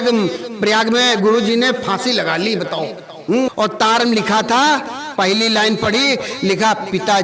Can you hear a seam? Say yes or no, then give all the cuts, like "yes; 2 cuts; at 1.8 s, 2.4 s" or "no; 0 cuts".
yes; 1 cut; at 3.5 s